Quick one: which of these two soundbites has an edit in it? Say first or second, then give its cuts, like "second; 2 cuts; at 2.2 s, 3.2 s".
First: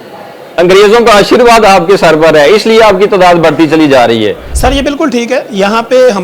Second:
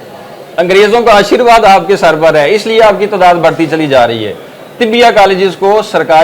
first; 1 cut; at 4.5 s